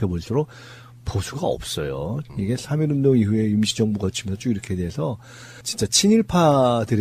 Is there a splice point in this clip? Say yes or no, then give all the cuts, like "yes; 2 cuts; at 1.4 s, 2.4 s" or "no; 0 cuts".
no; 0 cuts